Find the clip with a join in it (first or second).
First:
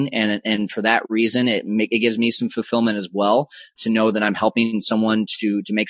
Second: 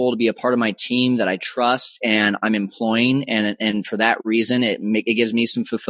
first